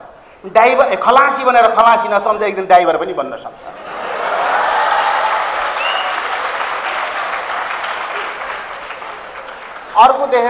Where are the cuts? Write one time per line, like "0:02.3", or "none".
none